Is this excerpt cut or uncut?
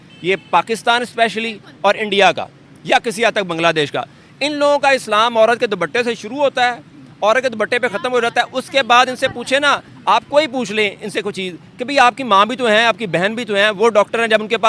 uncut